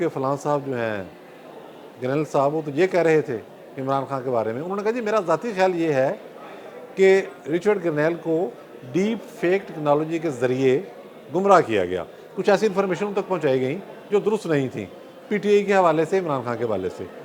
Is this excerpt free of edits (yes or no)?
yes